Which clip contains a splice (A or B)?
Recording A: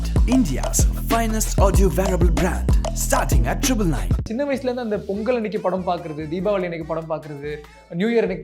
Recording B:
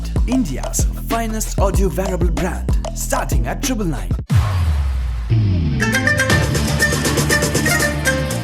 A